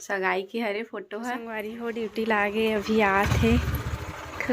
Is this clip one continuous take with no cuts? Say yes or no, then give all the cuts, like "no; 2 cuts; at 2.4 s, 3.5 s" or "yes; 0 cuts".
no; 1 cut; at 1.4 s